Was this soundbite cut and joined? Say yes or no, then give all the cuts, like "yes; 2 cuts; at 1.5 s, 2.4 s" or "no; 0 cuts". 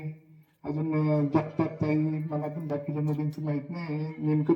no; 0 cuts